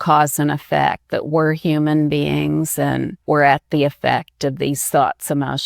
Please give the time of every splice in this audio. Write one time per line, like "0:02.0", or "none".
0:03.1